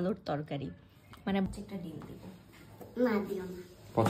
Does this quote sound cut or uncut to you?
cut